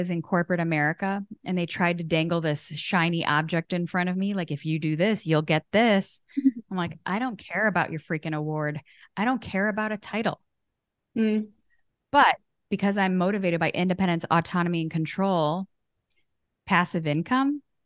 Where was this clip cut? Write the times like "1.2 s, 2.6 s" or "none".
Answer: none